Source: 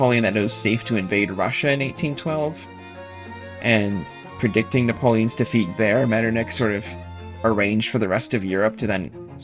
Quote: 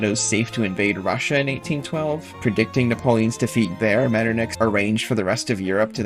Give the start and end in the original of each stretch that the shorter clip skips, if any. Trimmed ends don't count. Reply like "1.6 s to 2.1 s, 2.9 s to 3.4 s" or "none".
2.6 s to 4.3 s, 6.5 s to 7.4 s